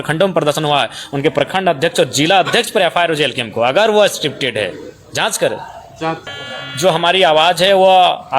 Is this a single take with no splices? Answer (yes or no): no